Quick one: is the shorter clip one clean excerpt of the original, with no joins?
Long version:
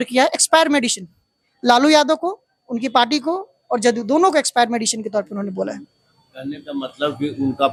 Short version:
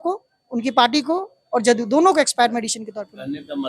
no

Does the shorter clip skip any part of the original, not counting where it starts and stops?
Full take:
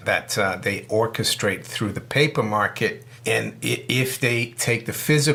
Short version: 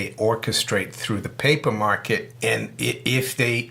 yes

